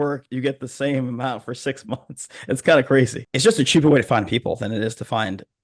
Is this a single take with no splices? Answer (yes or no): no